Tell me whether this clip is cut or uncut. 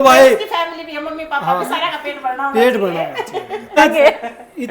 cut